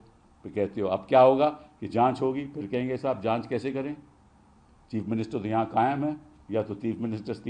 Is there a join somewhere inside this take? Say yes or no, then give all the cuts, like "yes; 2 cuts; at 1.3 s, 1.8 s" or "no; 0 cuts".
no; 0 cuts